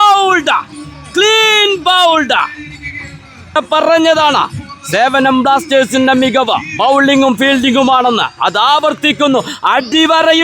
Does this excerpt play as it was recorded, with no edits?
no; 1 cut; at 3.6 s

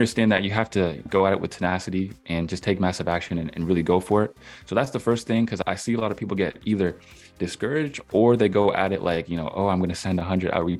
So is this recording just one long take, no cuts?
yes; 0 cuts

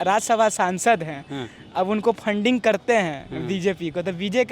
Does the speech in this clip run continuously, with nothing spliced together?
yes; 0 cuts

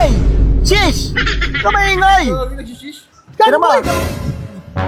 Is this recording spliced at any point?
no; 0 cuts

